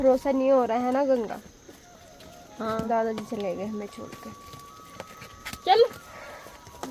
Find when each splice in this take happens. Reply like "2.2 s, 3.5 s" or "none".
none

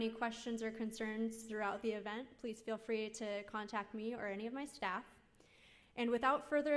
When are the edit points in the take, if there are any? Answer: 4.7 s

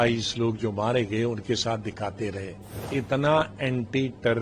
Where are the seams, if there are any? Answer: 2.9 s

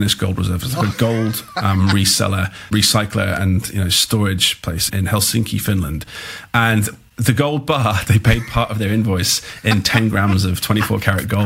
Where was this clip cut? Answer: 4.9 s, 8.0 s

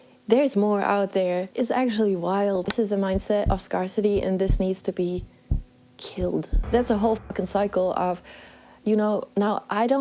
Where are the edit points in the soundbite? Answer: 1.5 s, 2.7 s, 6.6 s

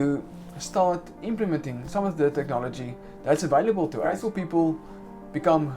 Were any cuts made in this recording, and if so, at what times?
4.2 s

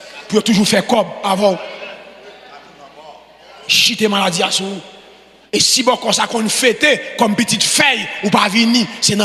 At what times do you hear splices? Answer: none

